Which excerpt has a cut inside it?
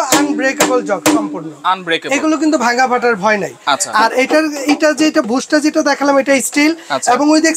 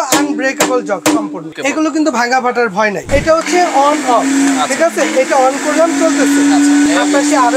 second; 3 cuts; at 1.5 s, 3.0 s, 6.8 s

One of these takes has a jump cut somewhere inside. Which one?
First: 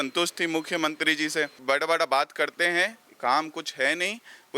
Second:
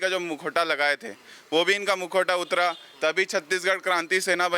first; 1 cut; at 1.6 s

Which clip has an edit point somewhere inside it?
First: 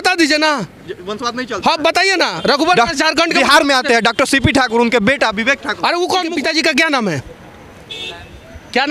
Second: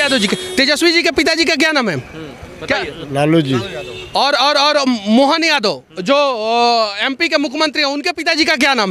first; 1 cut; at 6.3 s

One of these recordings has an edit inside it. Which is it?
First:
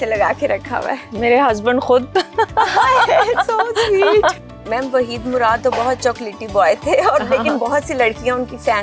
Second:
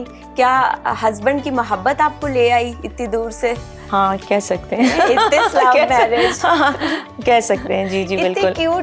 first; 1 cut; at 4.4 s

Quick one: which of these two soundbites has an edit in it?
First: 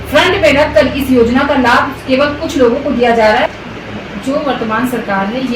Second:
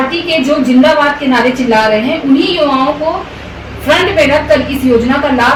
first; 1 cut; at 3.5 s

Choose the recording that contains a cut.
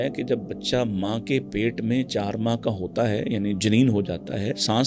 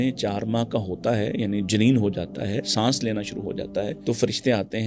second; 1 cut; at 4.0 s

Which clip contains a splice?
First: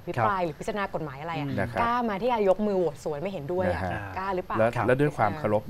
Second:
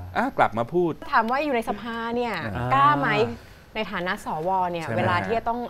second; 1 cut; at 1.1 s

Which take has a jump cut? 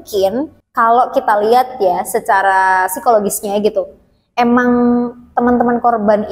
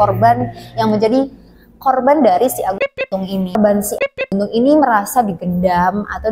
second; 1 cut; at 3.6 s

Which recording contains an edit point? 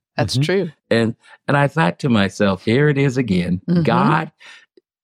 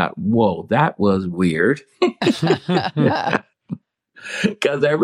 second; 1 cut; at 3.5 s

